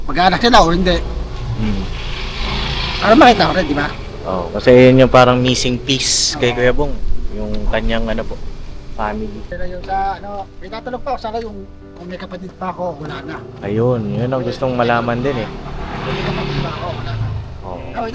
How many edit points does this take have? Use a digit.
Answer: 1